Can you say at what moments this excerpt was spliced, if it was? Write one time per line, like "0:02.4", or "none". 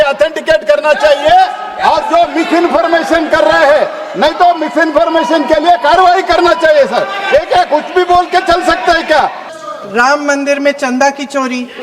0:09.5